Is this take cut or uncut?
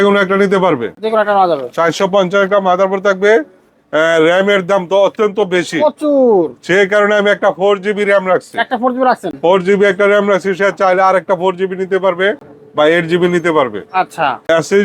uncut